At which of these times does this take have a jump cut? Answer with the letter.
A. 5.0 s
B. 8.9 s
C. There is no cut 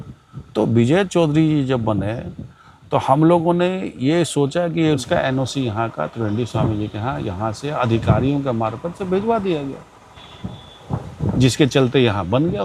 A